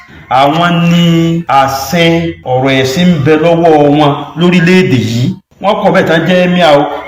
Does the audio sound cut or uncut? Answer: cut